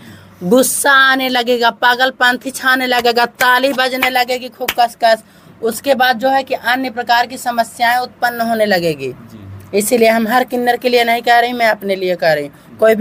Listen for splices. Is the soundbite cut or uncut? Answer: uncut